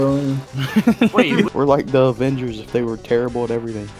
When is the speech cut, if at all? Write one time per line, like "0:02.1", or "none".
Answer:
0:01.5

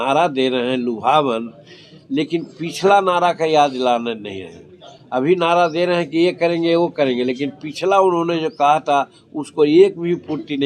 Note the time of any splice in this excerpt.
none

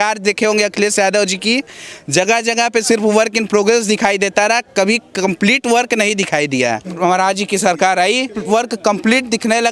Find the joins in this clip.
0:06.9
0:08.4

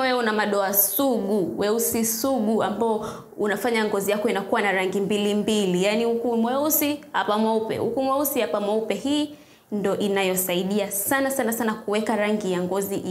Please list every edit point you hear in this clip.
none

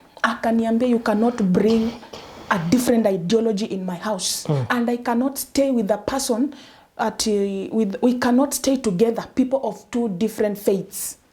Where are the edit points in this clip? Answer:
none

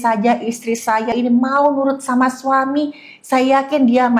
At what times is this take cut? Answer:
0:01.1

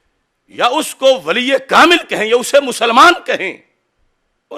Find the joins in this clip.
none

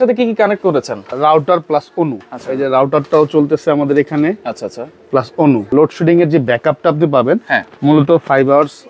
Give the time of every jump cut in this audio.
0:01.1
0:05.7

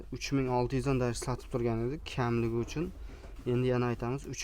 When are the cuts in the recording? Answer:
none

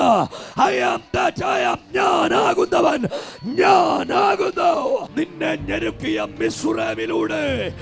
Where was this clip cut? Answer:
0:05.3

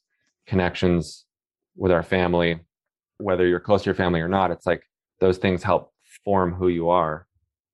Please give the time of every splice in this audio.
0:03.2

